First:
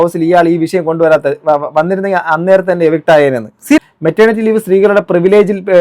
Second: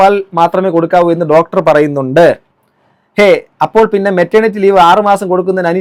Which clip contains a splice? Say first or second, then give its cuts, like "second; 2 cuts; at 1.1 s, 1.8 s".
first; 1 cut; at 3.8 s